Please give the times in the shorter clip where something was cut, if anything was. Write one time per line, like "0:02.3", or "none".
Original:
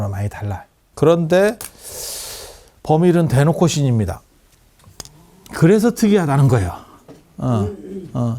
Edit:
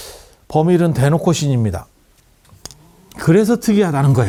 none

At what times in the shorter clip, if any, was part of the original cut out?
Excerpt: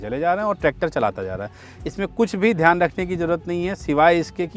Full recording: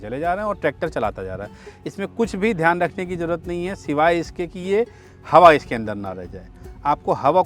none

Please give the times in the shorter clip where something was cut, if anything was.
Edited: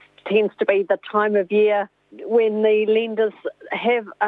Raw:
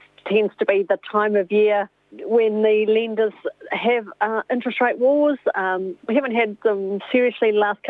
none

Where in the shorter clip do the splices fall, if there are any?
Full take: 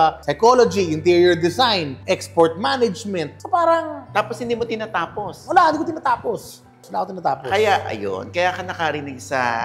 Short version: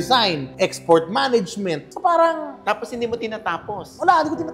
none

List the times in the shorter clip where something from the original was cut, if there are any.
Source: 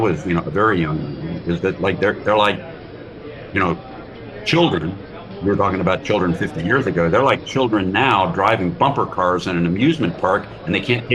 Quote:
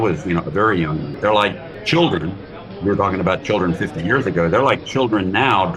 0:01.3

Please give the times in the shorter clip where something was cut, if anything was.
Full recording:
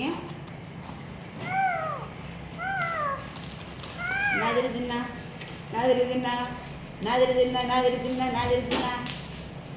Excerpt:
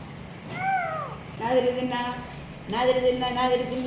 0:01.2

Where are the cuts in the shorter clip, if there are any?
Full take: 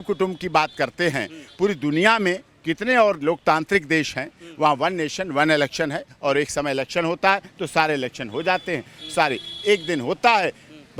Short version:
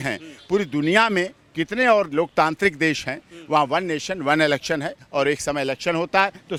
none

